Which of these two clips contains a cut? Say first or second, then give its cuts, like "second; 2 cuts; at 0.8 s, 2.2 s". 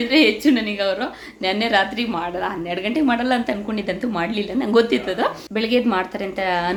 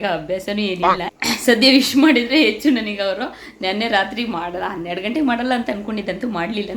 second; 1 cut; at 1.1 s